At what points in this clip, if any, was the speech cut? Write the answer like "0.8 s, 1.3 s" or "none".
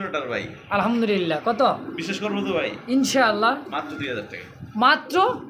none